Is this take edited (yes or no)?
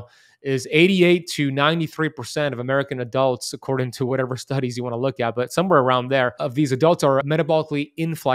yes